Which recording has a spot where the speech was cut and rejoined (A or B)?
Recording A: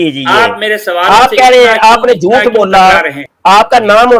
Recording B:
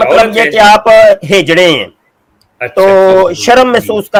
A